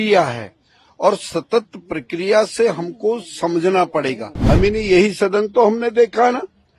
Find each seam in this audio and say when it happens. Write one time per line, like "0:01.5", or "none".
0:04.3

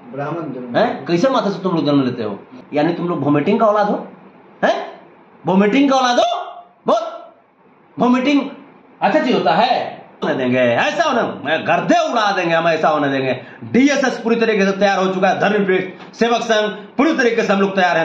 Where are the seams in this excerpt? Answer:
0:02.6
0:10.2

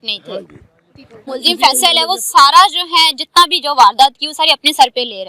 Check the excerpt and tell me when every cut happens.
0:01.3

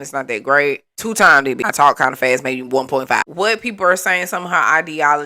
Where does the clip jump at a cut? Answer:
0:01.6
0:03.2

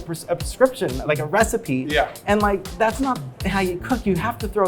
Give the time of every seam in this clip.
0:02.7

